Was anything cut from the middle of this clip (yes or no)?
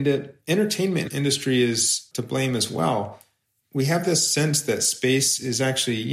yes